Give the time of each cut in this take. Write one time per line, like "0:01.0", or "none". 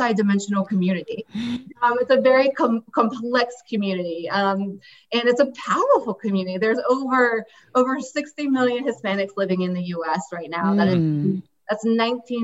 0:01.7